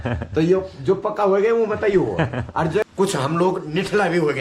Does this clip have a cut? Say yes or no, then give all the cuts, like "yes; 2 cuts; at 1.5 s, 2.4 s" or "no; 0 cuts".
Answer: yes; 1 cut; at 2.8 s